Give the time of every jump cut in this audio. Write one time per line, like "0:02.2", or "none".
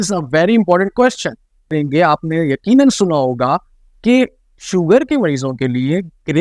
0:01.7